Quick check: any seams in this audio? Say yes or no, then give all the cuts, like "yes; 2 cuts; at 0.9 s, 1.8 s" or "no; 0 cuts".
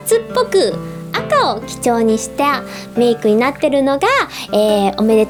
no; 0 cuts